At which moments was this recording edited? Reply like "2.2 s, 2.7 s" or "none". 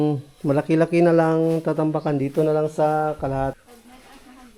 3.6 s

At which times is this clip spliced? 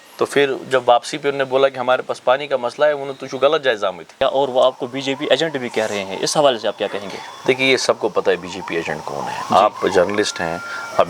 4.2 s

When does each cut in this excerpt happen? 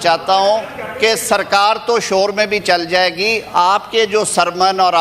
none

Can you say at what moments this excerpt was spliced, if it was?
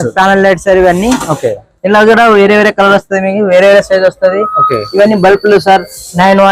none

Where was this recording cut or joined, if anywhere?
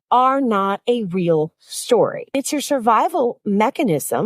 2.3 s

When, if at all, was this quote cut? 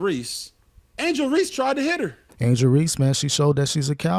2.3 s

